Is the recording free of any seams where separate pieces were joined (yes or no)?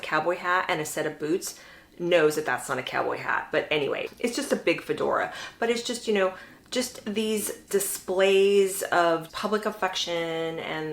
no